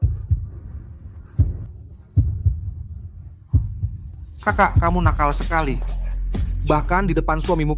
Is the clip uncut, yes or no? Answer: no